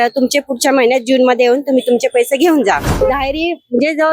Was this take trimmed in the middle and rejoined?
yes; 1 cut; at 2.9 s

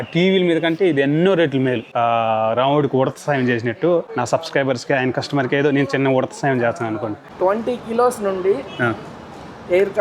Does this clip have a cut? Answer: yes; 2 cuts; at 1.9 s, 7.3 s

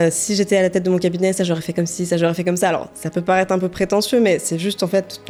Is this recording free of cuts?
yes; 0 cuts

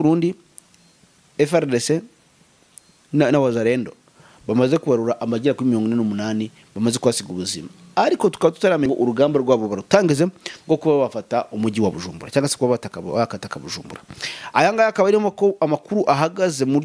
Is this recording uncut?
no; 1 cut; at 8.9 s

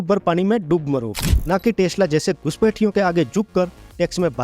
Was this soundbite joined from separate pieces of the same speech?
yes; 1 cut; at 1.2 s

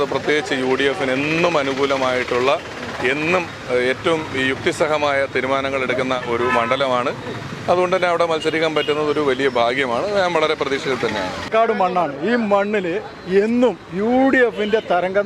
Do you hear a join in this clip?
yes; 1 cut; at 11.5 s

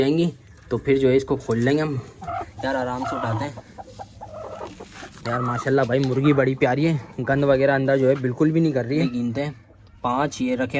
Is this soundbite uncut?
no; 2 cuts; at 2.1 s, 9.0 s

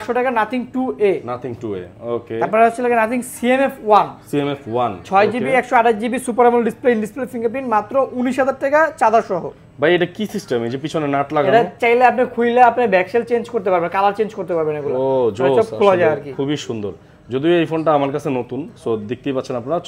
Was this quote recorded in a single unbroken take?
yes; 0 cuts

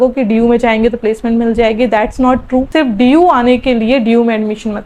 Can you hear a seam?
yes; 1 cut; at 2.7 s

